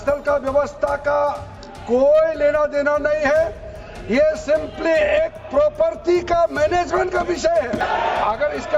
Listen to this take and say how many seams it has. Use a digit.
1